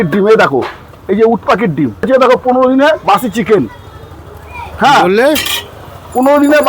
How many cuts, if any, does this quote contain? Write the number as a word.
one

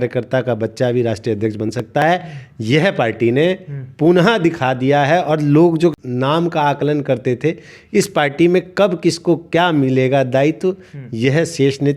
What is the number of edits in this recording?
one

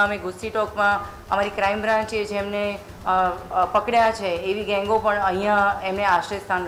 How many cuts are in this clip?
zero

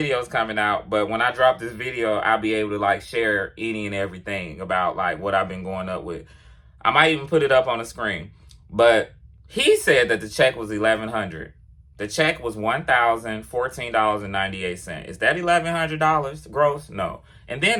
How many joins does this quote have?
zero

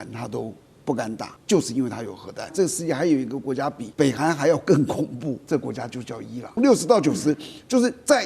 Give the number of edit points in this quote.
five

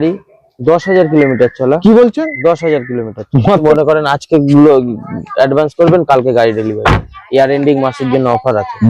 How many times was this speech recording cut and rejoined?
one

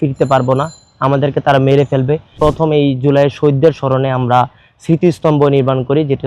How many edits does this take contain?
one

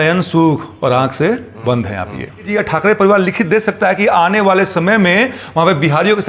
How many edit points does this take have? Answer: one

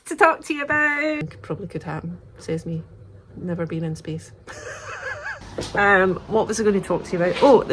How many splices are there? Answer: two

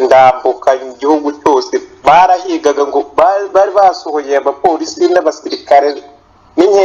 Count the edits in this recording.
zero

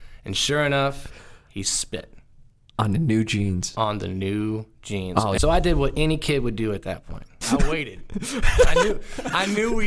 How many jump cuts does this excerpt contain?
two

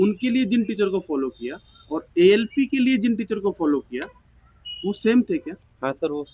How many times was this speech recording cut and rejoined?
zero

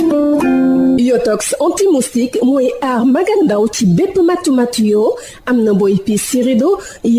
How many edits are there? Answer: one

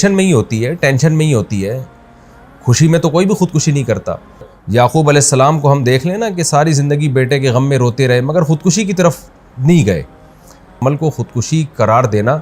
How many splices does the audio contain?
two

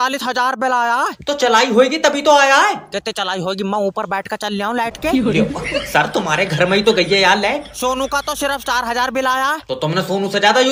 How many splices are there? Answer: zero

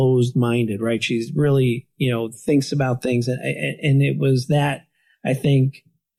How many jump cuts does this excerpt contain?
zero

